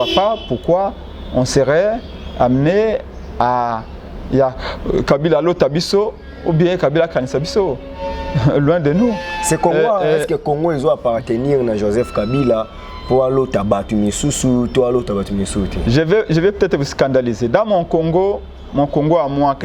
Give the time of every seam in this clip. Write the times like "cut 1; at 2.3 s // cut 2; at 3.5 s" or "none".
none